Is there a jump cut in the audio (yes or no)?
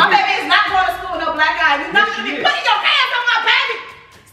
no